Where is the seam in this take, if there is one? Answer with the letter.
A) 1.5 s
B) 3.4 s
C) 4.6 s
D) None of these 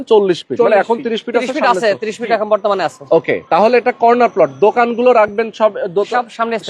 B